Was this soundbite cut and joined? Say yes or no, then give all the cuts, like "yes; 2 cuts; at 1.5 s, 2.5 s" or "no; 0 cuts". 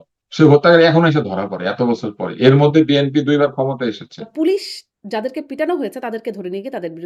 yes; 1 cut; at 4.2 s